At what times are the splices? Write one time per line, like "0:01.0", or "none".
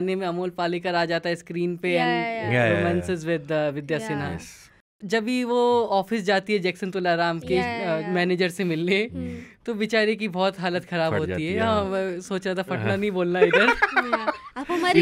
0:04.5